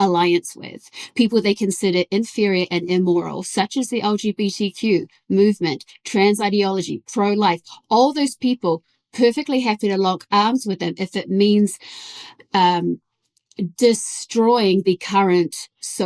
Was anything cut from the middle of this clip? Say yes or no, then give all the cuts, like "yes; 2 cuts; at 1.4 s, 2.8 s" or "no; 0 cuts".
no; 0 cuts